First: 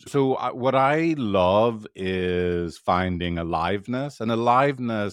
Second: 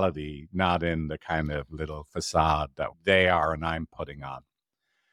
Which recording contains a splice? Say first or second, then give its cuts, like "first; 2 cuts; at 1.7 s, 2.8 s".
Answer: second; 1 cut; at 3.0 s